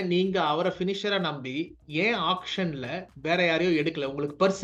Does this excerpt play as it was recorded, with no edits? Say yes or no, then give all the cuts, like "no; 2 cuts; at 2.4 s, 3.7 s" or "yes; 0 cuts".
yes; 0 cuts